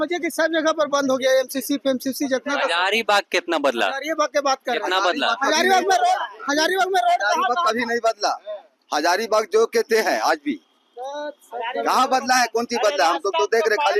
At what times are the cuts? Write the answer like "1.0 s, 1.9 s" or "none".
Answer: none